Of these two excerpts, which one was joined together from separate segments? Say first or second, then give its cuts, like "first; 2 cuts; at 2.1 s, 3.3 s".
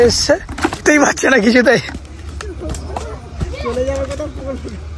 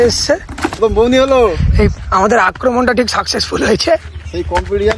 second; 2 cuts; at 0.7 s, 1.9 s